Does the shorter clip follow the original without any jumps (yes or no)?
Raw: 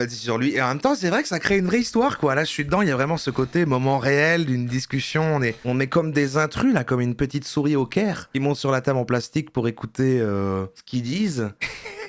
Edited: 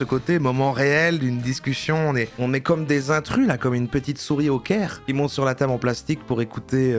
yes